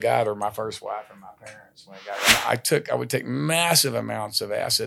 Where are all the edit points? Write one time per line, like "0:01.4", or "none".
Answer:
0:02.3